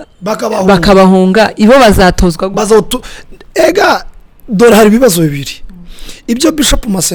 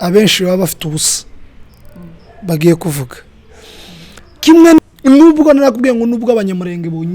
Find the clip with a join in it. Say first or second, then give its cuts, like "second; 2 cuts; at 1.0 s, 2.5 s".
second; 1 cut; at 4.8 s